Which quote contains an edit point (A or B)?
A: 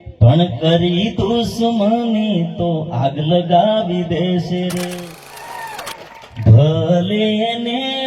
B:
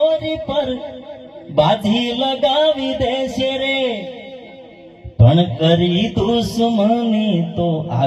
A